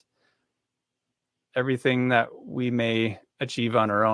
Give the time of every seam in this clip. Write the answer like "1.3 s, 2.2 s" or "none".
none